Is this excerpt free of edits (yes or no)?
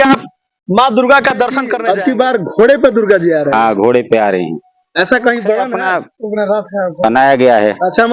no